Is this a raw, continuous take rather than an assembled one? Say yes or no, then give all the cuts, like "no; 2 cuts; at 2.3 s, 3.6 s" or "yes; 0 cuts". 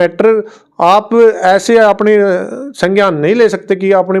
yes; 0 cuts